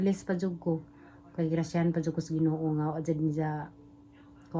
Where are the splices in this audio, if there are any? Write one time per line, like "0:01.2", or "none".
none